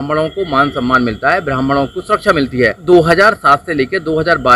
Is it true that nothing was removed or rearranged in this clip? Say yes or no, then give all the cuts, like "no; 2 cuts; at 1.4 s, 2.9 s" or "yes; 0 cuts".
no; 1 cut; at 2.8 s